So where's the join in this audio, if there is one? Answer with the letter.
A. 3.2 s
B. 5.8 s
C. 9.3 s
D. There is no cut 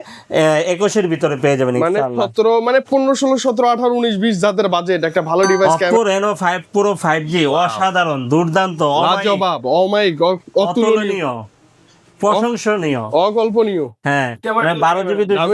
B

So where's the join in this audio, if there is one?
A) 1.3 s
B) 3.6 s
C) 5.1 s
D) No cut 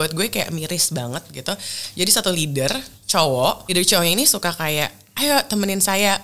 B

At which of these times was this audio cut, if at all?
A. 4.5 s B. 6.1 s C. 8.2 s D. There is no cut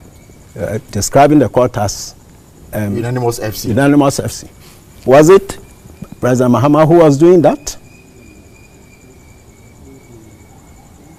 D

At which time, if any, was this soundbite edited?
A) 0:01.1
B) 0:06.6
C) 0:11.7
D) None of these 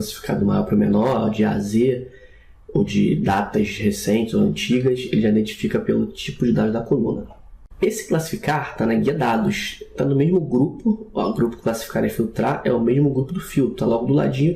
C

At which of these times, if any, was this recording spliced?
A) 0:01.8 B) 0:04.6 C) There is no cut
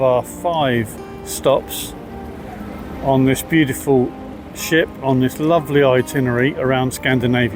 C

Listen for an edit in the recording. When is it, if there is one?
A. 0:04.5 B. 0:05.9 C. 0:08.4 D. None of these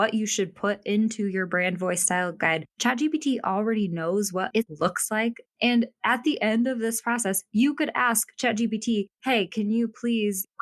A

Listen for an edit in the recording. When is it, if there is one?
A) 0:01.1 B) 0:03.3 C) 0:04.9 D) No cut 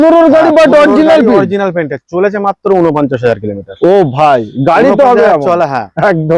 D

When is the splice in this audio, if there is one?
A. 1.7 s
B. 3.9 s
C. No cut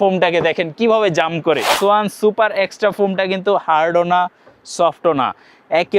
A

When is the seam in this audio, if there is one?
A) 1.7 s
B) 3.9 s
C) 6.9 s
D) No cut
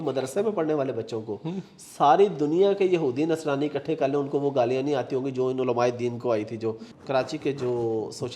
C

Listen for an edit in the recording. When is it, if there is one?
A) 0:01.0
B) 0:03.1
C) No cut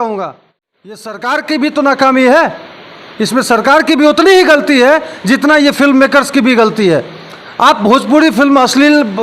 A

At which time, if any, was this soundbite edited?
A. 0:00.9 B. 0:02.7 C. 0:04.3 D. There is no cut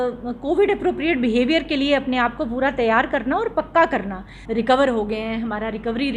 C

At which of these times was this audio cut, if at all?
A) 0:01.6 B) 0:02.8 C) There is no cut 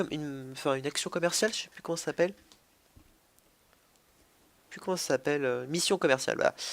C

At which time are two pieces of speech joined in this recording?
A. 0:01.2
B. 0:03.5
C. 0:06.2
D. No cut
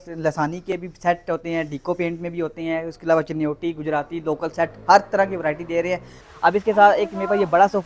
C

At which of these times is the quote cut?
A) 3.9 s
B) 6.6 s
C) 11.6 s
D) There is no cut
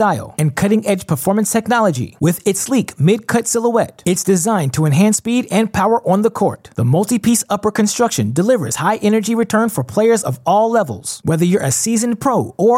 D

